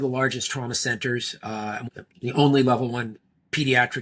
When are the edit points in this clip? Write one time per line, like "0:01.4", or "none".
0:01.9